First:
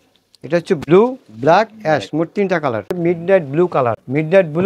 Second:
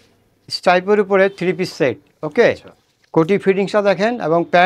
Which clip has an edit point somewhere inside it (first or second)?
first